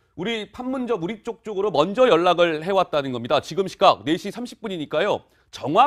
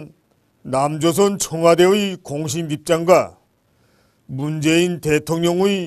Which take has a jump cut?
first; 1 cut; at 1.5 s

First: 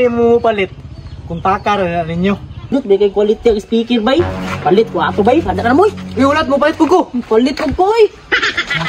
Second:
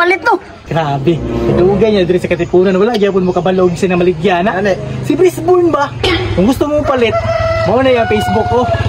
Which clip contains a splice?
first; 1 cut; at 2.7 s

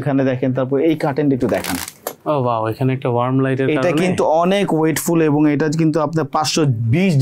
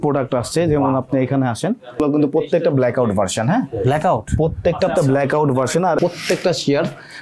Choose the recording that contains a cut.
second; 2 cuts; at 2.0 s, 6.0 s

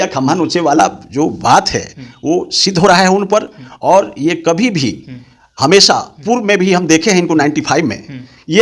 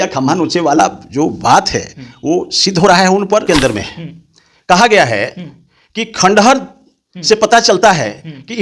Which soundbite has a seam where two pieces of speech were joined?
second; 1 cut; at 3.4 s

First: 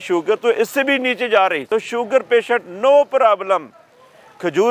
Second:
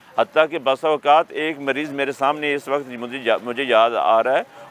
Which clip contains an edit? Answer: first; 1 cut; at 1.7 s

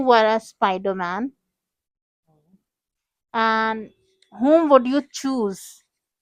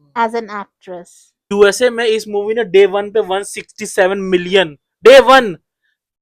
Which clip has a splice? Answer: second; 1 cut; at 1.5 s

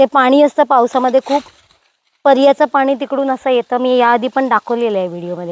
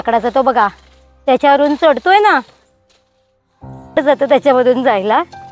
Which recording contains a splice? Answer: second; 1 cut; at 4.0 s

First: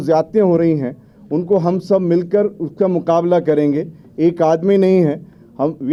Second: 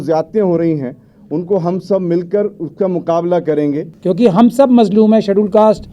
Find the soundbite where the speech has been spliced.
second; 1 cut; at 3.9 s

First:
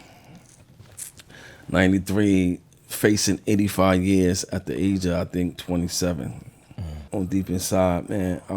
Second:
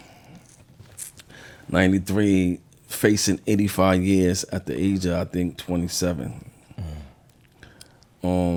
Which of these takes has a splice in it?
first; 1 cut; at 7.1 s

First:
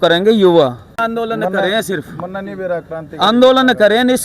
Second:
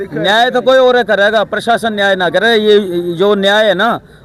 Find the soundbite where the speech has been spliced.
first; 1 cut; at 1.0 s

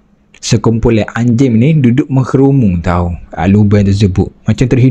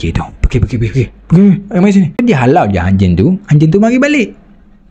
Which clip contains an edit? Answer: second; 1 cut; at 2.2 s

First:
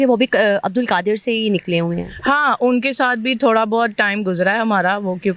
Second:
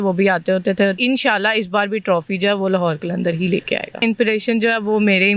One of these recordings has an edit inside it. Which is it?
second; 2 cuts; at 1.0 s, 4.0 s

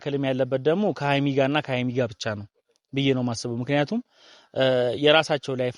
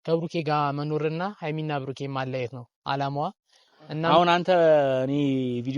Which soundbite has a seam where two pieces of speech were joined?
second; 1 cut; at 4.0 s

